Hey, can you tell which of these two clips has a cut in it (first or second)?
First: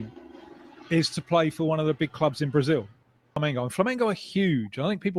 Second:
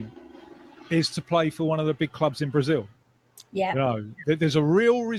first